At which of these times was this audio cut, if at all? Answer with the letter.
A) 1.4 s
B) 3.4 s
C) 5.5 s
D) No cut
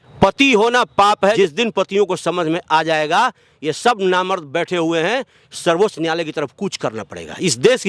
A